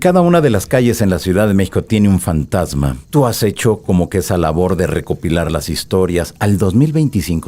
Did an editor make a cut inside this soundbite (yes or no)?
yes